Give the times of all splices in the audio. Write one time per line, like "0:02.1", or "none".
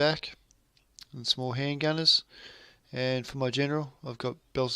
0:01.2

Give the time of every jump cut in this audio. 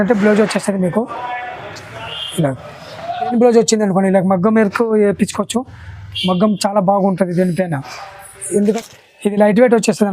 0:03.3
0:08.7

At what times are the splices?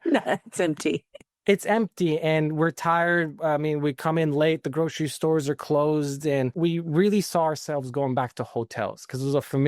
0:06.5

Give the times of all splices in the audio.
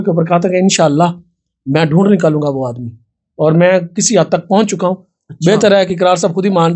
none

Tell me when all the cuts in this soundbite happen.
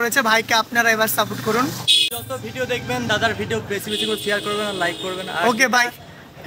0:02.1

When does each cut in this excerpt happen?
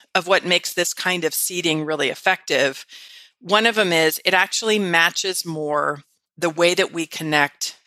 none

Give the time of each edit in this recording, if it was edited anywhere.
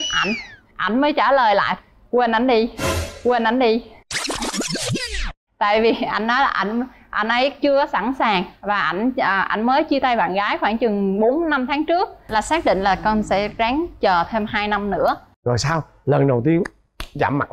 0:12.3

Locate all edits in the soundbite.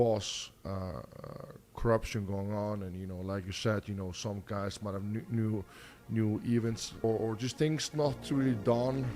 0:07.0

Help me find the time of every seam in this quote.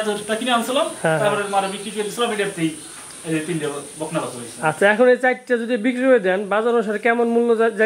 none

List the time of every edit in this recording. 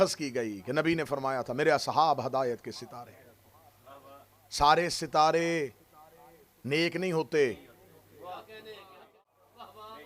0:09.2

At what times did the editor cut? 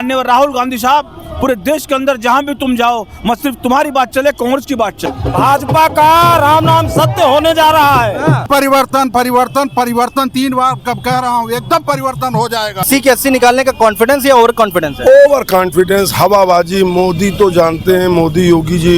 0:05.0
0:08.5
0:12.8

